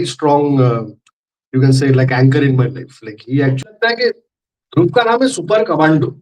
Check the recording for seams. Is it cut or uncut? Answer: cut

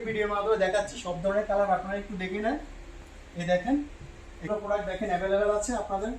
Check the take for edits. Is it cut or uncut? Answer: cut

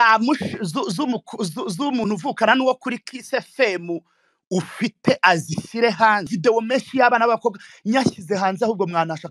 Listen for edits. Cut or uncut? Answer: cut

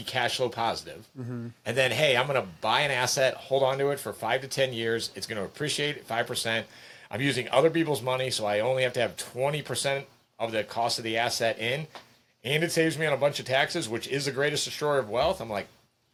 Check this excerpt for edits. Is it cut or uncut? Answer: uncut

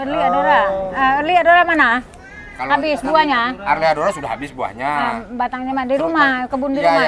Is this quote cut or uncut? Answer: uncut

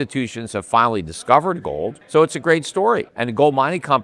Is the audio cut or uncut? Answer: cut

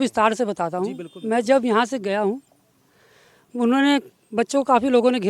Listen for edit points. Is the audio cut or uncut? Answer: uncut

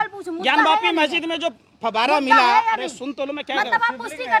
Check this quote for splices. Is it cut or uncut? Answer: uncut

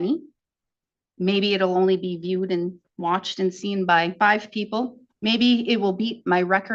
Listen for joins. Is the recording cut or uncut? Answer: cut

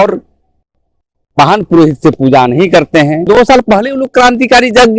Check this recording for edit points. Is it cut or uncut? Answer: cut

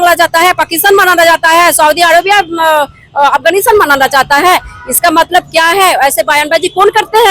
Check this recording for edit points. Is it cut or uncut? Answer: uncut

